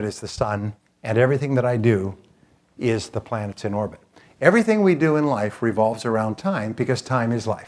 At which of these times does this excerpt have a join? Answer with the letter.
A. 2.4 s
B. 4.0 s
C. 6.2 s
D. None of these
D